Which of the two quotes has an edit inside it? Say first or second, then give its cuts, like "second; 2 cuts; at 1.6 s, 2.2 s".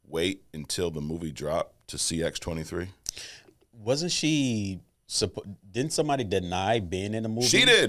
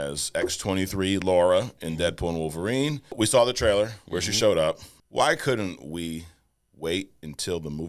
second; 2 cuts; at 3.1 s, 4.9 s